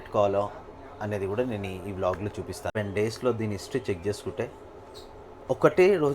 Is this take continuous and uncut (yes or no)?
no